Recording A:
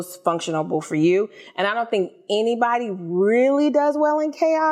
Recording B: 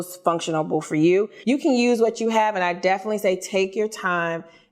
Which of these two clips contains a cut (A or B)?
B